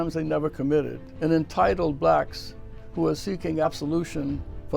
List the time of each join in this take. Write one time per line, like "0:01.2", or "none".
0:01.0
0:03.6